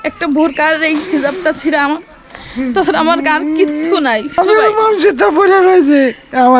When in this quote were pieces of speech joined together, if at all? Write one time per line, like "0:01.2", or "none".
0:04.4